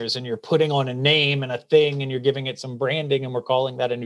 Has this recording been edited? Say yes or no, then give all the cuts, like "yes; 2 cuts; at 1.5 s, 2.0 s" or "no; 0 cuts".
no; 0 cuts